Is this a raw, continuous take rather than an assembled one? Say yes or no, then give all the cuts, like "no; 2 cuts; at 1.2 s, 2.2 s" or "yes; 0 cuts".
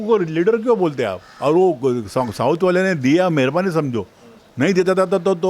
no; 1 cut; at 1.2 s